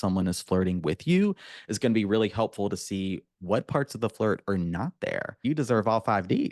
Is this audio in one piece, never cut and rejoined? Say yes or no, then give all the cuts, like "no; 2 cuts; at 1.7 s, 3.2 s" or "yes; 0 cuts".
no; 1 cut; at 5.4 s